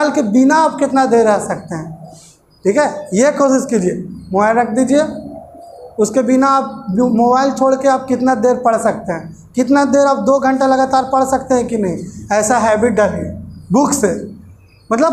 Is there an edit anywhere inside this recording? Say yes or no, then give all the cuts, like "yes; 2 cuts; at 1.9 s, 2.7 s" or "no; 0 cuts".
no; 0 cuts